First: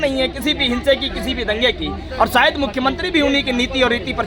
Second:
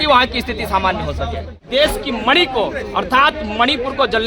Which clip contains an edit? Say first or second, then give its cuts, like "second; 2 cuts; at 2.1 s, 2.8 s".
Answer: second; 1 cut; at 1.5 s